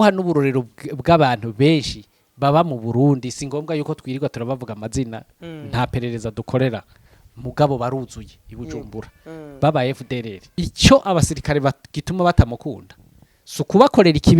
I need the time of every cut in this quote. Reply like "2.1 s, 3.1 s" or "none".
10.6 s